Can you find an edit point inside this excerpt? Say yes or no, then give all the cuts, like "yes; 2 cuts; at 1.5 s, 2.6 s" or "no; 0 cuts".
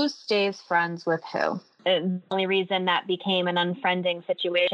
yes; 1 cut; at 1.7 s